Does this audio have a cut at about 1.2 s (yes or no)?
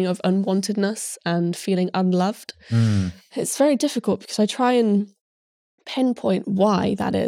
no